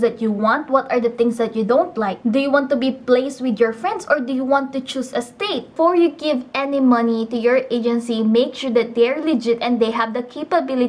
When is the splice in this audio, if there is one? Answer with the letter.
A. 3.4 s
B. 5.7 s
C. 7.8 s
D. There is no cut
B